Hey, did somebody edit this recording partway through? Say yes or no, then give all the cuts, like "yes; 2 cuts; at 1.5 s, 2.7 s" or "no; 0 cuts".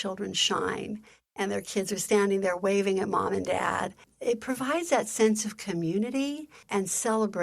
yes; 2 cuts; at 4.1 s, 6.5 s